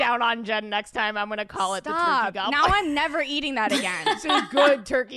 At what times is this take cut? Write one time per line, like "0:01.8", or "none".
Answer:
0:04.3